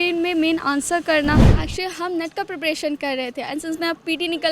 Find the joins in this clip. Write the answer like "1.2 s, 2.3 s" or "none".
1.5 s